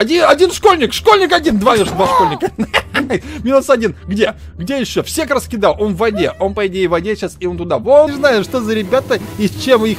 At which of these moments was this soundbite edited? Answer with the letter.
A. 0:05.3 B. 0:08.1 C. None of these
B